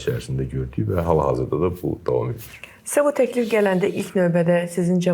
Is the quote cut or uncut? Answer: uncut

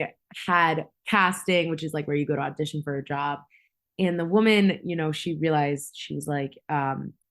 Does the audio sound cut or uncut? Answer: cut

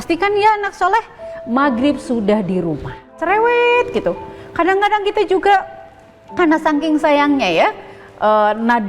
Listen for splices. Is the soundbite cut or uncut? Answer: cut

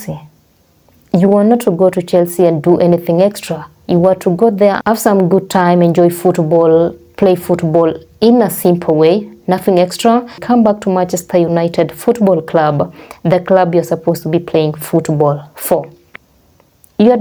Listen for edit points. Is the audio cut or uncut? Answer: uncut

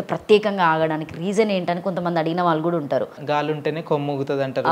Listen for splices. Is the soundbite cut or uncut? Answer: cut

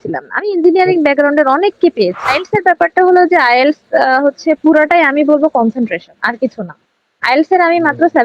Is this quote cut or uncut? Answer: cut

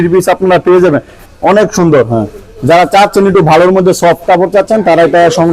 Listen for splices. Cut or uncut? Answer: cut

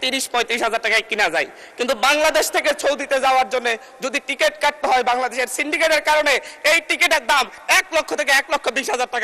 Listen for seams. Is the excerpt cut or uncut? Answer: uncut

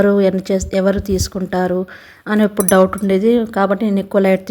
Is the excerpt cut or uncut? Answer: uncut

